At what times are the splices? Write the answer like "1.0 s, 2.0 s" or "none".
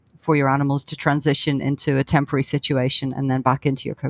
none